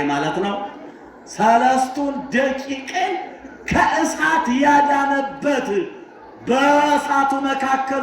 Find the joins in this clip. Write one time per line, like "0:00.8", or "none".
none